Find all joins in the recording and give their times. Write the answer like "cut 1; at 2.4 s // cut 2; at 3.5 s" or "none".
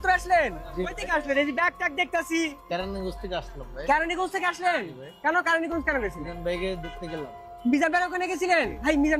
none